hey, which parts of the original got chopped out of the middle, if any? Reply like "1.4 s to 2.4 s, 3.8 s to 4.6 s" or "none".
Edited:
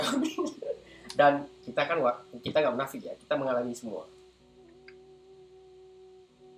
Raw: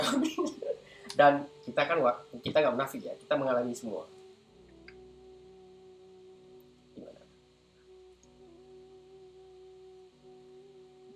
4.1 s to 7.9 s